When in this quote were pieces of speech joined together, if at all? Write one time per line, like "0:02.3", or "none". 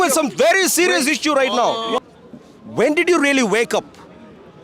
0:02.0